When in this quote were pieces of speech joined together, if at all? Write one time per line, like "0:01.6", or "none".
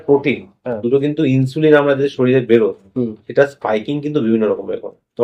none